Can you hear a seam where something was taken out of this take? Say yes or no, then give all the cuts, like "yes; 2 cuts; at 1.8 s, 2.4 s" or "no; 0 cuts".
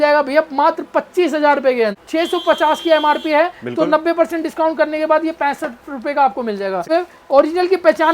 yes; 2 cuts; at 1.9 s, 6.8 s